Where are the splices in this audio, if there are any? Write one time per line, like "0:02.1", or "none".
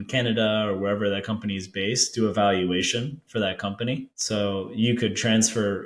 0:04.1